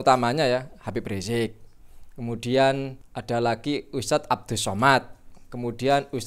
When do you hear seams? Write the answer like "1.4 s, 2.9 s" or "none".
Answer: 3.1 s